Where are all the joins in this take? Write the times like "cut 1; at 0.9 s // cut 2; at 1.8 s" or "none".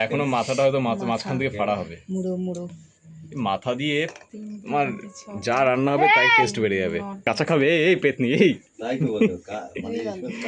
cut 1; at 7.2 s